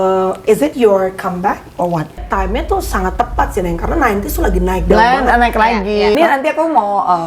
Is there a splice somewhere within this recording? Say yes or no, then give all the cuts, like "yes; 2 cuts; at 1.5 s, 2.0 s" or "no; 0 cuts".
yes; 2 cuts; at 2.2 s, 6.2 s